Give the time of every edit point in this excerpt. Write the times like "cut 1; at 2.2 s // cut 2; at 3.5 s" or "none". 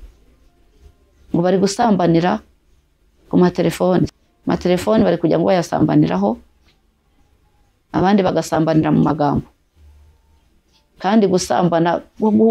cut 1; at 4.1 s